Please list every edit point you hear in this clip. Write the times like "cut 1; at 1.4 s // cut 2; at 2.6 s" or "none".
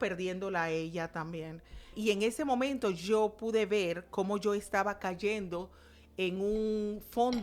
cut 1; at 2.0 s